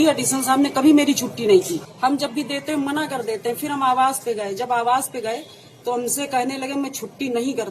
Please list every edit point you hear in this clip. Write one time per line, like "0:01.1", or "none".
0:01.8